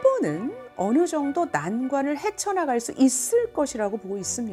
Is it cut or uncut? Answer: uncut